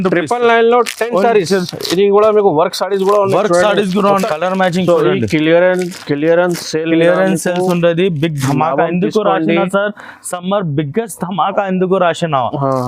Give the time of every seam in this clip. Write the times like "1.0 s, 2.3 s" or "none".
4.1 s

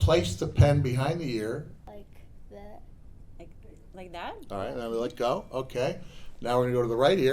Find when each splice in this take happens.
1.9 s

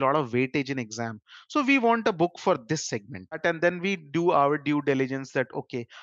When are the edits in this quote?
3.4 s

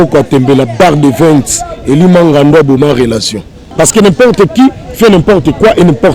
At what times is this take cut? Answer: 3.6 s

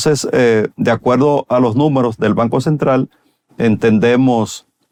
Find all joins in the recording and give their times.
none

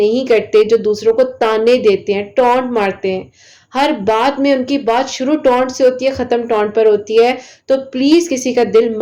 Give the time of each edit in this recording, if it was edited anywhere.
none

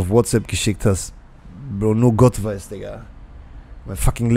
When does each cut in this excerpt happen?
none

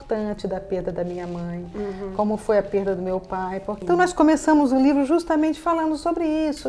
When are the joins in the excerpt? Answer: 3.7 s

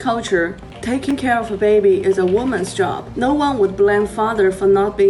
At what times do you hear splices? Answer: 1.1 s

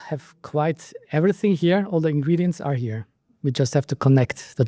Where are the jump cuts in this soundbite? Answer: none

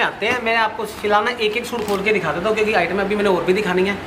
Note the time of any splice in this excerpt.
none

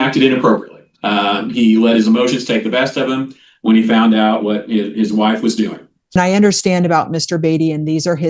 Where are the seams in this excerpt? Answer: 6.1 s

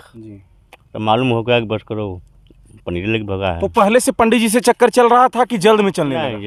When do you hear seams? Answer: none

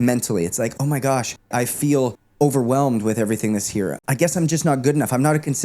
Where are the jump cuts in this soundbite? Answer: 1.4 s, 4.0 s

